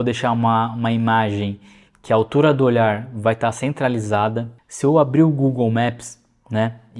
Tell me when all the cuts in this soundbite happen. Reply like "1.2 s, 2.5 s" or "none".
4.6 s